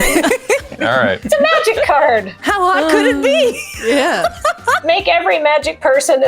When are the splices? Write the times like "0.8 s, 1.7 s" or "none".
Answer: 2.4 s, 4.8 s

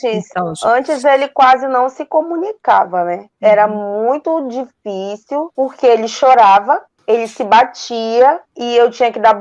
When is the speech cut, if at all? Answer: 3.3 s, 5.5 s, 6.9 s, 8.5 s

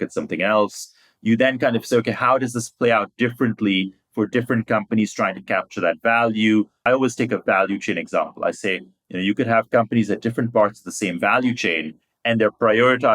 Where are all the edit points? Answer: 6.8 s

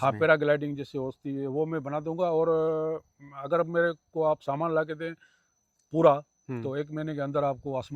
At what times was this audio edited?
none

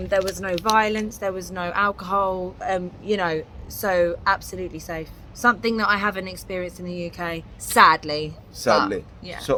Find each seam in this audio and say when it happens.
none

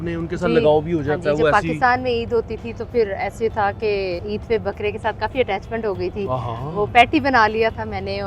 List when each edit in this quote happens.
4.2 s

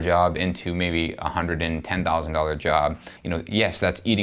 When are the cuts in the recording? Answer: 3.1 s

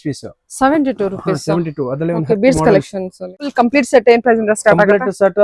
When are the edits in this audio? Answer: 3.4 s

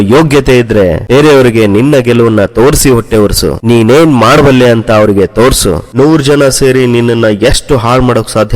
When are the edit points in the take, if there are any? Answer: 5.9 s

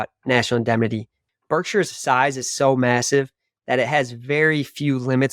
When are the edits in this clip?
1.2 s

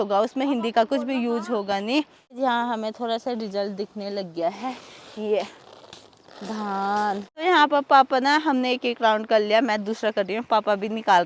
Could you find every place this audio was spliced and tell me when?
2.2 s, 7.3 s

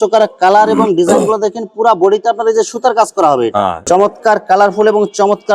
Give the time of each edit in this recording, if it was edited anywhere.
3.8 s

